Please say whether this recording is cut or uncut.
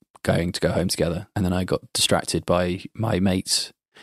cut